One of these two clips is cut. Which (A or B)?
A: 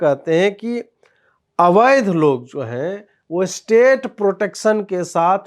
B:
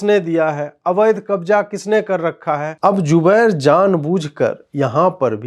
B